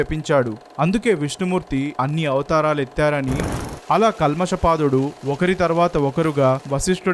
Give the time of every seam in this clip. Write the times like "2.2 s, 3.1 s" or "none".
3.5 s